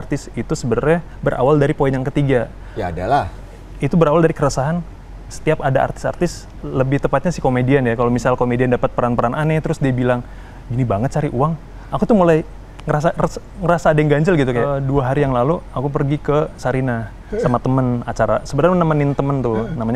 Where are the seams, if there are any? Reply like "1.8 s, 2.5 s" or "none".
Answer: 14.7 s